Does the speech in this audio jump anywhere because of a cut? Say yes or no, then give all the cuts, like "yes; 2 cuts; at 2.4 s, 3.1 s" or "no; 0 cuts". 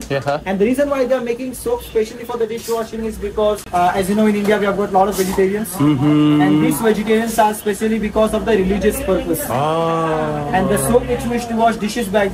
no; 0 cuts